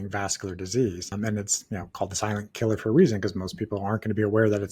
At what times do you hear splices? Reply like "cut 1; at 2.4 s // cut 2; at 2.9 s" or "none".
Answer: cut 1; at 1.1 s